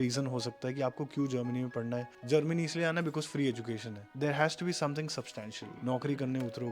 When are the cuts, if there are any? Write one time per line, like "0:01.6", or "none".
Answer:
0:02.1
0:04.1
0:05.7